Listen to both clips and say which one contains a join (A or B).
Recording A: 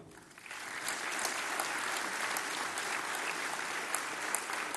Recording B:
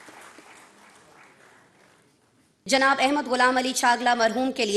B